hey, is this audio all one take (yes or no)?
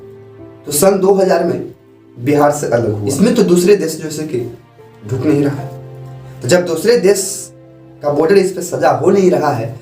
no